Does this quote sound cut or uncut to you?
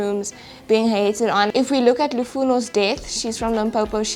cut